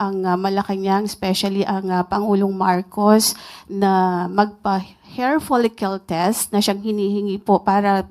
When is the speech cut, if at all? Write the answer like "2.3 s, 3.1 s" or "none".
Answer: none